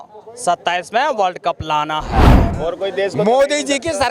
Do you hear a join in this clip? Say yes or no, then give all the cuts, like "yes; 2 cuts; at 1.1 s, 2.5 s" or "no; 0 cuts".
yes; 1 cut; at 2.5 s